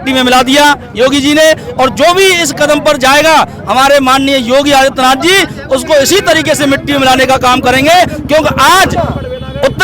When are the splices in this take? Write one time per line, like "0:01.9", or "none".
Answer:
none